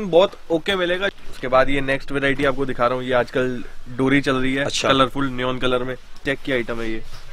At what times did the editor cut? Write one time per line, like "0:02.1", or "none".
0:01.1
0:06.2